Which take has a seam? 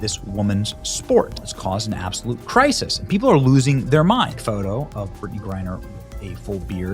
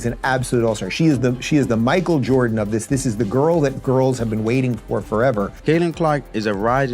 second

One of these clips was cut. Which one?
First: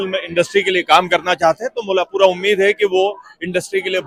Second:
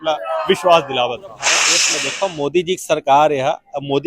second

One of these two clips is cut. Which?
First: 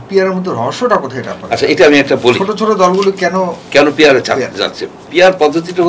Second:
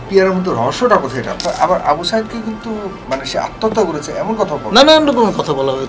second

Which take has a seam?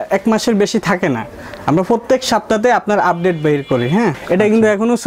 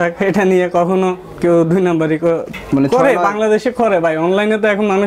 first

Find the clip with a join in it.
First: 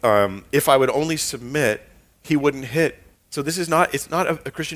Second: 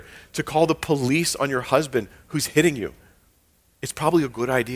first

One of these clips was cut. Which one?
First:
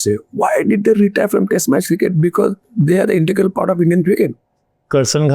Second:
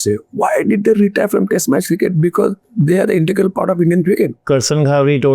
second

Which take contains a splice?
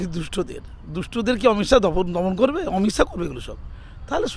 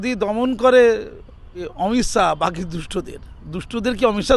second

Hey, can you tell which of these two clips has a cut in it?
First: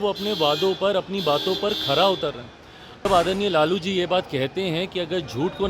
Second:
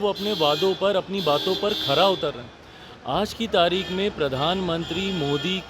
first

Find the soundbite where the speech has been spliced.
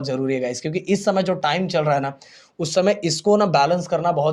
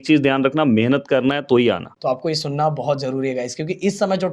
second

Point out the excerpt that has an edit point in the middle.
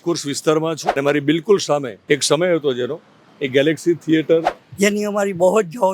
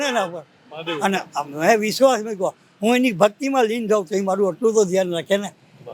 first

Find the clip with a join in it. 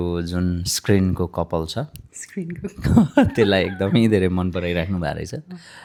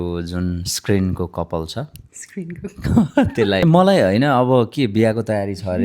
second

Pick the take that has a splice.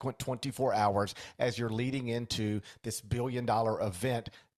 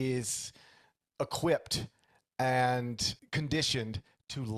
second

